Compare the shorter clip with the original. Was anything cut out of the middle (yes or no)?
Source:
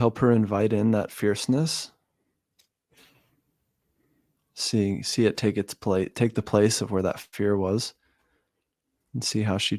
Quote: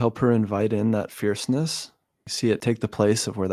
yes